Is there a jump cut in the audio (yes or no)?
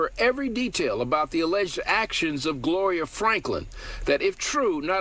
no